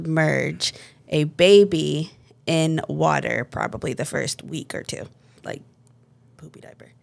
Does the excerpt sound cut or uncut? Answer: cut